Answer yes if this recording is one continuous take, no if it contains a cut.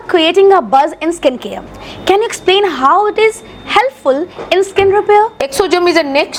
yes